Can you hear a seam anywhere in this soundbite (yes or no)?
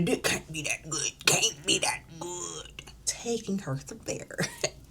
yes